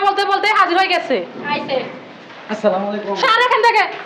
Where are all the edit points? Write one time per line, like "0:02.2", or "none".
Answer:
none